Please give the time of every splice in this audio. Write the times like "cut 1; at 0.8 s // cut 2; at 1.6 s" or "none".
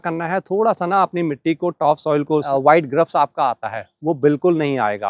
cut 1; at 2.5 s